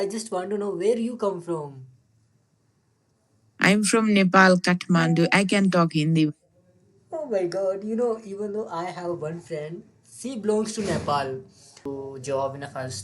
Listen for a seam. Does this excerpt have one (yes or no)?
yes